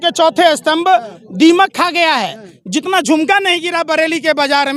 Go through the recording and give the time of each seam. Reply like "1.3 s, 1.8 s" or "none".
none